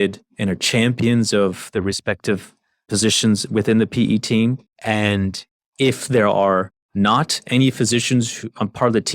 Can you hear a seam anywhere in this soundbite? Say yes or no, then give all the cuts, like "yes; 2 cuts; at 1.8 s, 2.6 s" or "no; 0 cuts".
yes; 2 cuts; at 4.7 s, 6.8 s